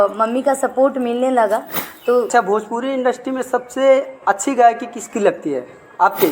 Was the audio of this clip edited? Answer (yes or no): yes